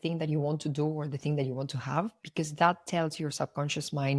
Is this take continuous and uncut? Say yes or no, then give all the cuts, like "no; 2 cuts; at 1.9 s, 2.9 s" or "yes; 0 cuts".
no; 1 cut; at 2.2 s